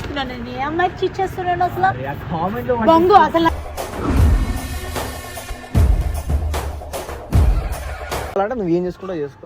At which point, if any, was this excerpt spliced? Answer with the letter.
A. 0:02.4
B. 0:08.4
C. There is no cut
B